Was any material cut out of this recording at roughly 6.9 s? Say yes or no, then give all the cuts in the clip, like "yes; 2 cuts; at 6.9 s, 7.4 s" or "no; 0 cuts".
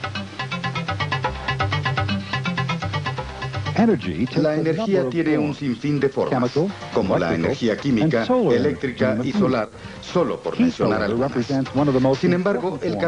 no; 1 cut; at 1.0 s